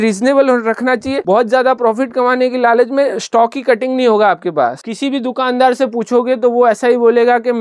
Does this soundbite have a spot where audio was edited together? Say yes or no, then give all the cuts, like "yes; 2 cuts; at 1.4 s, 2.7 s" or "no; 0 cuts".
yes; 1 cut; at 4.8 s